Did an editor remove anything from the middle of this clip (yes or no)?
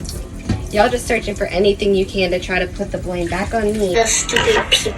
yes